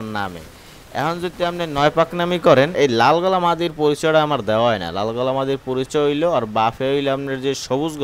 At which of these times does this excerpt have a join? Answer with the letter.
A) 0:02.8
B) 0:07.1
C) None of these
A